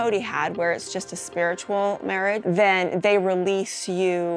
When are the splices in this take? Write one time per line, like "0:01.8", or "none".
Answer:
0:02.4